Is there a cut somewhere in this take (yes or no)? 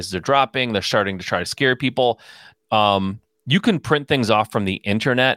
no